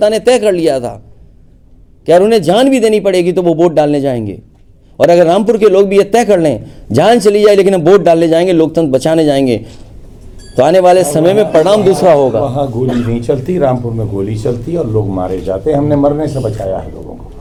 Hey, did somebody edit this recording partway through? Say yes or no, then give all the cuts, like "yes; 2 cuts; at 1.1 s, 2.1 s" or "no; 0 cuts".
no; 0 cuts